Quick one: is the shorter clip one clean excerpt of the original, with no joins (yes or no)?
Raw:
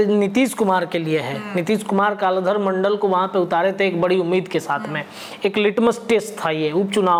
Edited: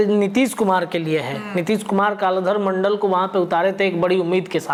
yes